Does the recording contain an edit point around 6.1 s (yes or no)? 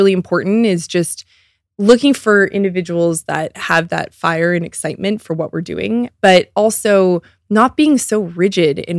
yes